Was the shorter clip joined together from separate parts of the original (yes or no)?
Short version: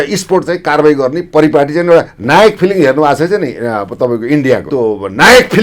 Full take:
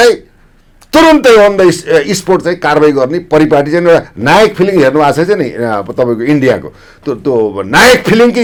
yes